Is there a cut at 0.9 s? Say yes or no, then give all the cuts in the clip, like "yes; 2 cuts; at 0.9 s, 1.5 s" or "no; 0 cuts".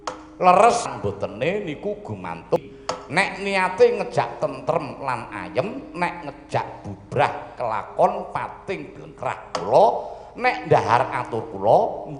yes; 2 cuts; at 0.9 s, 2.6 s